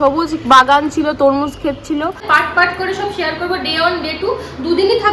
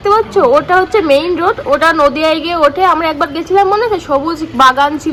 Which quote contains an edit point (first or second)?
first